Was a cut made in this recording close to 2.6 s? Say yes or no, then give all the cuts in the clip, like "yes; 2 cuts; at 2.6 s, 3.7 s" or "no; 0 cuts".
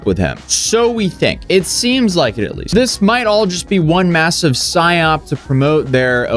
yes; 1 cut; at 2.6 s